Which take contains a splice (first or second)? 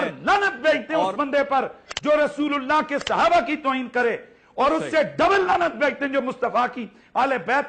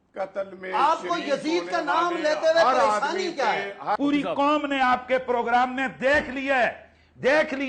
second